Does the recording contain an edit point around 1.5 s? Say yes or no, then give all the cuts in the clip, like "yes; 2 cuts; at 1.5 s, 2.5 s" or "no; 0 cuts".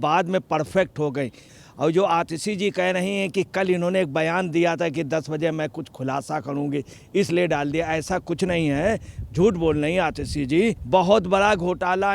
yes; 2 cuts; at 1.5 s, 10.8 s